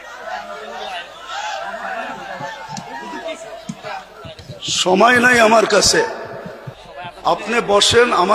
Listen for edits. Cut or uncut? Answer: uncut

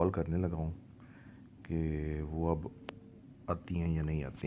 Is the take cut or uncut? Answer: uncut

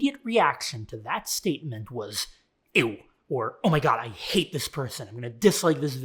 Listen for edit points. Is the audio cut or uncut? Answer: uncut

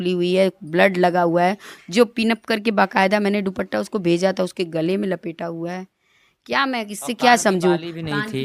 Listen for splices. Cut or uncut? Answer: uncut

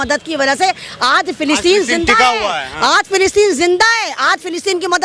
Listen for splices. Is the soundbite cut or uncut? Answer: uncut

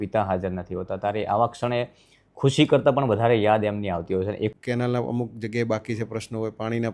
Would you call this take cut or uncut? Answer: cut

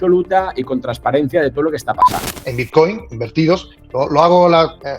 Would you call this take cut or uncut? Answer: cut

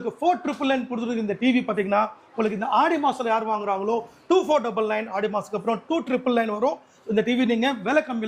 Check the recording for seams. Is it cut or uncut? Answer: uncut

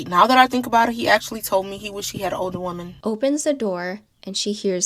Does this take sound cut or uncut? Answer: cut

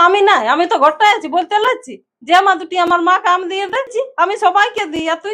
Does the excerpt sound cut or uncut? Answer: cut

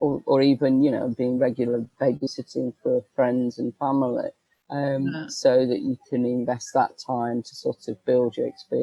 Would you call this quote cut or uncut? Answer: uncut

